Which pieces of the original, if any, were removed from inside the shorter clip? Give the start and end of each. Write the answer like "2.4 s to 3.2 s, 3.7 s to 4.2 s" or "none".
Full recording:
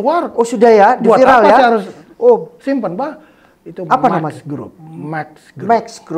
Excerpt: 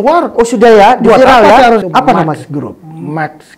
1.9 s to 3.8 s